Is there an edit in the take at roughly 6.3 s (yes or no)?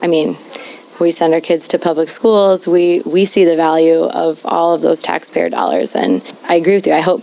yes